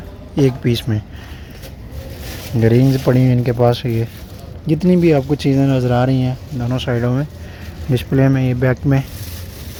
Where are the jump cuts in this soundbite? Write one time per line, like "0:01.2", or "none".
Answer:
none